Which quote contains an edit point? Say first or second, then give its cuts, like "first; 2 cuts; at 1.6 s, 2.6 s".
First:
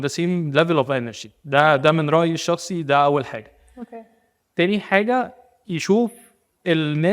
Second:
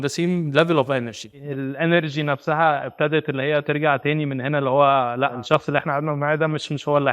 second; 2 cuts; at 1.3 s, 5.4 s